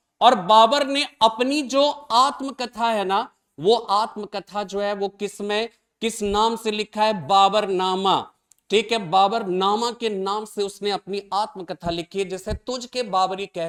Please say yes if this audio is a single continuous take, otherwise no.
yes